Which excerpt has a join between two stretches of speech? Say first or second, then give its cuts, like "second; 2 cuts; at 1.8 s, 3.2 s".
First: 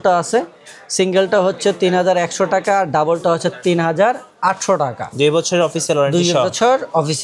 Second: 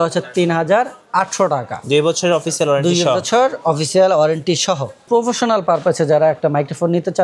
second; 1 cut; at 5.0 s